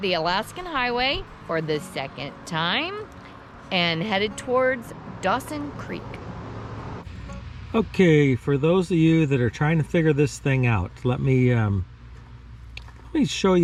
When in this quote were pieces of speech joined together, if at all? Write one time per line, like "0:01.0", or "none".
none